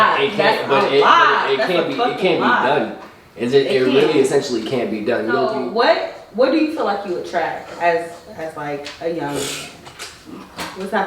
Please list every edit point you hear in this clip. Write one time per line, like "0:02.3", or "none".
0:05.5